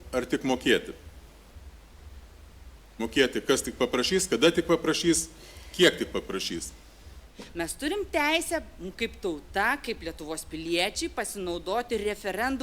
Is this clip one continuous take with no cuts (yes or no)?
no